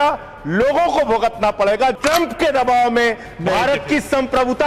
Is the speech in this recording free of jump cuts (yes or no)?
no